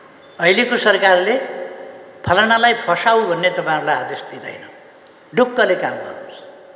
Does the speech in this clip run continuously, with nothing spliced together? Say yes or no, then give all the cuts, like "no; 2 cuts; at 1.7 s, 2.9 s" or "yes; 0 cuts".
yes; 0 cuts